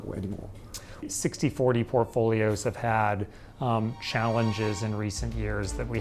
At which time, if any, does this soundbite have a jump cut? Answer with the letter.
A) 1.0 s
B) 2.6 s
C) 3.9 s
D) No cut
A